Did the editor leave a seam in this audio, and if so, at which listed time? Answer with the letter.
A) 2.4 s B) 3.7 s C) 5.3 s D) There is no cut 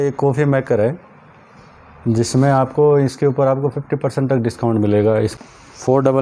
C